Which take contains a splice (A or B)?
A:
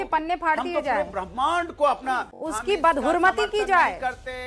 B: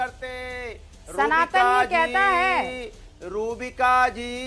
A